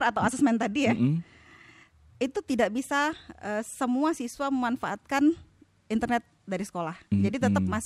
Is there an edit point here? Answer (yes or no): no